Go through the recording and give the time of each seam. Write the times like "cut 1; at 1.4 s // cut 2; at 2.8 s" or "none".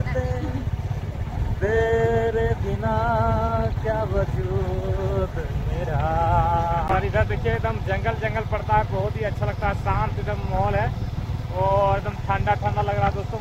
cut 1; at 6.9 s

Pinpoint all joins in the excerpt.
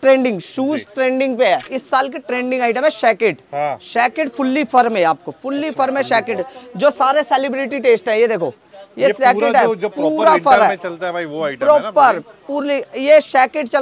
cut 1; at 1.8 s

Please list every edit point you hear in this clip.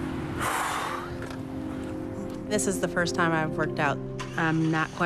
none

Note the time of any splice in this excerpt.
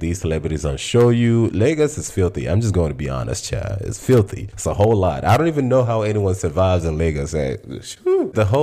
none

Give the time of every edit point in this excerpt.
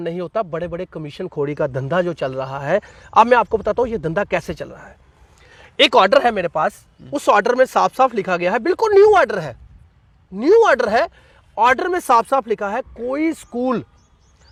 none

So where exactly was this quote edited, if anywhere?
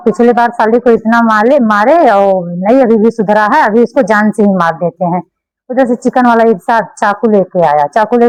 none

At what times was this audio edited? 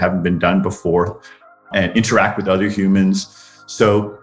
cut 1; at 1.6 s

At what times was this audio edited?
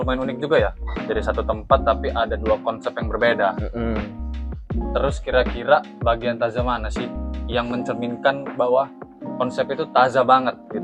none

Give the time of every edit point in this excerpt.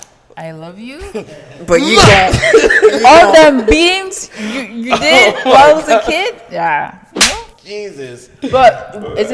none

